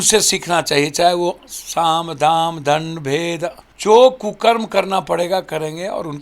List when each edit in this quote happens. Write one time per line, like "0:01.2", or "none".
0:03.7